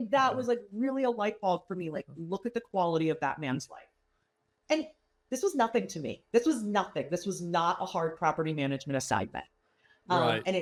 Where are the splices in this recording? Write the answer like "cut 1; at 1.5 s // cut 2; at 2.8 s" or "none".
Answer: none

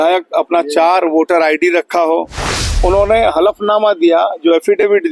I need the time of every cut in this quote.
cut 1; at 2.7 s

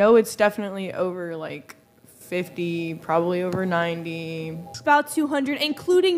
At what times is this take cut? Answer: cut 1; at 4.7 s

